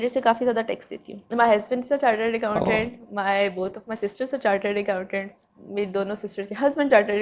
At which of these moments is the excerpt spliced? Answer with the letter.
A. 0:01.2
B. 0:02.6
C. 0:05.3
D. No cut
A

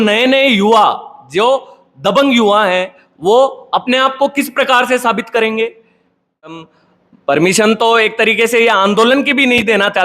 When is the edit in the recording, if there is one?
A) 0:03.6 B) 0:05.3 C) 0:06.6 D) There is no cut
C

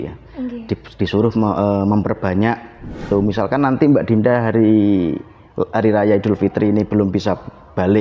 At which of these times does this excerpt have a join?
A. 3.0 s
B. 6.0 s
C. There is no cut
A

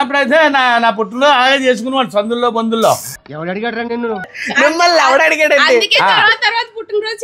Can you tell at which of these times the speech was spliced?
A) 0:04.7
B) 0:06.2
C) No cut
C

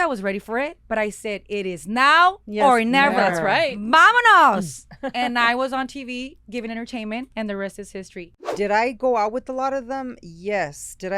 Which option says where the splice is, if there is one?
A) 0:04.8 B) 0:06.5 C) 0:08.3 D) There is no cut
C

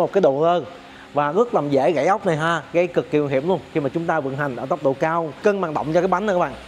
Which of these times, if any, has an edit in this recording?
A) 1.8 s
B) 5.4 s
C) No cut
B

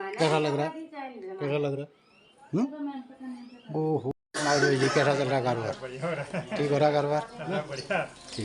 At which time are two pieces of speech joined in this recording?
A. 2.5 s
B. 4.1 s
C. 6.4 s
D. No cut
B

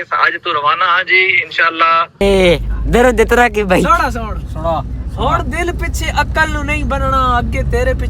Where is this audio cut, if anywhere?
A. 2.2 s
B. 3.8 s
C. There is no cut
A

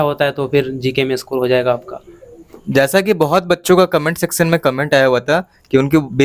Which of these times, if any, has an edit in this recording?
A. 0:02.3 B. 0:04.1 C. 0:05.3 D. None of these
D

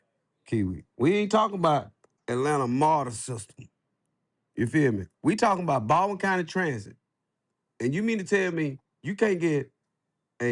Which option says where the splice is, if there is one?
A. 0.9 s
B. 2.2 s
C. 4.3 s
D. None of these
B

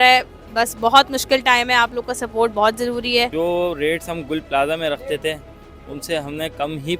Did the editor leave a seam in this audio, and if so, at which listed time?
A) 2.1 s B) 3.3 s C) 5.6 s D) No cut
B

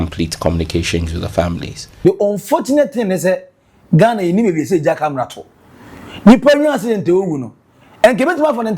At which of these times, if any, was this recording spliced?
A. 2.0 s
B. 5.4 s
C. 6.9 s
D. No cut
A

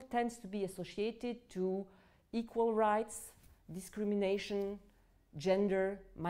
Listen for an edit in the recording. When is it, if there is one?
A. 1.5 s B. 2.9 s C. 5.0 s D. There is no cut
D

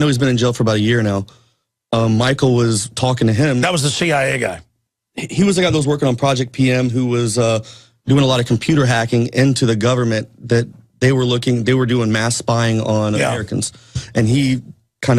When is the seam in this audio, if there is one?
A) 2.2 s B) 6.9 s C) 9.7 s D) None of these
C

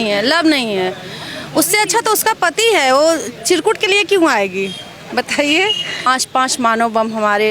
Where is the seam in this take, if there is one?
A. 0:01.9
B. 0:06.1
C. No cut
B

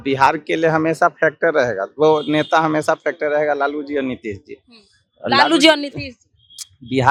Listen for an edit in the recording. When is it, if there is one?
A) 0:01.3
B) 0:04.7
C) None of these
C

